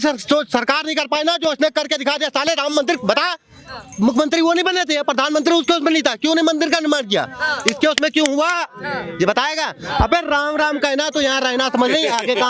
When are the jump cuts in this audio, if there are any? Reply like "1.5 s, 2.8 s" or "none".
none